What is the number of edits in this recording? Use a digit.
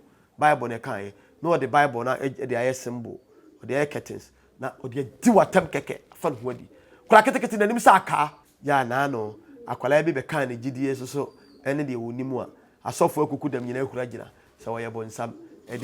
1